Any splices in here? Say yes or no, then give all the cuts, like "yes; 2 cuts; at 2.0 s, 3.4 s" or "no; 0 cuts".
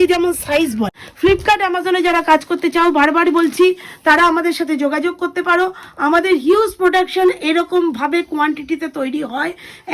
yes; 1 cut; at 1.0 s